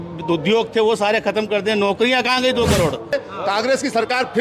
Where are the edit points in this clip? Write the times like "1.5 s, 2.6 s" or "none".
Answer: 3.1 s